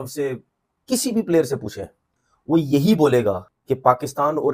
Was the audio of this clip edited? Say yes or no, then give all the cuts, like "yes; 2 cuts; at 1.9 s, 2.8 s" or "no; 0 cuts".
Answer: no; 0 cuts